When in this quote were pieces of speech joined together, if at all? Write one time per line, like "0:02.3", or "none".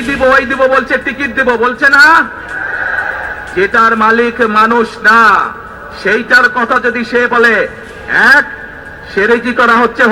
none